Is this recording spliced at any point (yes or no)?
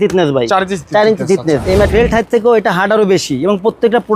yes